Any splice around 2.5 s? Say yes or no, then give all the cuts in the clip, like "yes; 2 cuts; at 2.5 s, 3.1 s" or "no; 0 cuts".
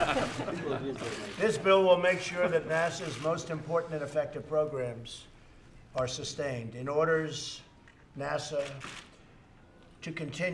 no; 1 cut; at 4.7 s